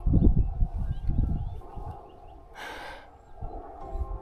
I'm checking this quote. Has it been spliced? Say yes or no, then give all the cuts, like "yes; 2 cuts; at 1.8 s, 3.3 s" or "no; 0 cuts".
no; 0 cuts